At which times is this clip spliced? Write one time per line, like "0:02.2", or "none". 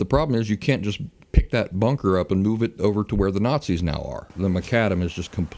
0:04.2

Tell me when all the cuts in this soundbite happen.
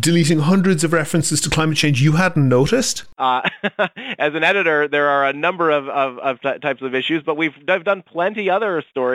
0:03.0

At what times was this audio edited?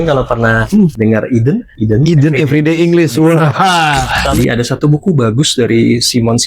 0:00.9
0:01.7
0:04.3

